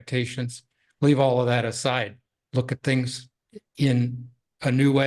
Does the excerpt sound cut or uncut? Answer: uncut